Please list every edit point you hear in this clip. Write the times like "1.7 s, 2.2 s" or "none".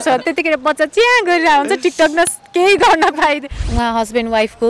3.6 s